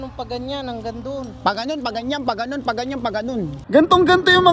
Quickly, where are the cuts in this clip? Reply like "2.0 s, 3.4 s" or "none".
3.6 s